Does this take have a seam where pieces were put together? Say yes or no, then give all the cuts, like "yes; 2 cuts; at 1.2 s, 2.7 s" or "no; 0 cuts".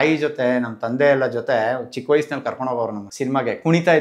yes; 1 cut; at 3.0 s